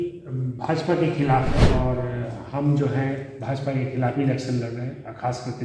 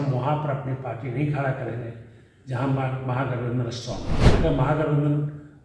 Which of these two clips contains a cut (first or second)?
first